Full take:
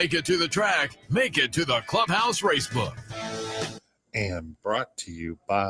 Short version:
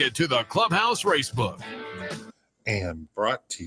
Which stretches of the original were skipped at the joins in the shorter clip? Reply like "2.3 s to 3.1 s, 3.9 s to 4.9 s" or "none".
3.6 s to 3.7 s